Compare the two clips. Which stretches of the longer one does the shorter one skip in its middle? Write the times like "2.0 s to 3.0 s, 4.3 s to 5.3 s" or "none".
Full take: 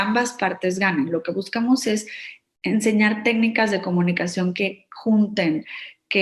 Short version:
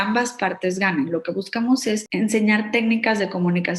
2.1 s to 2.6 s